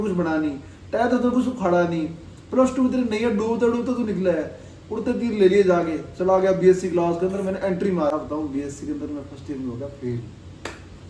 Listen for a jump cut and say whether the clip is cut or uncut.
cut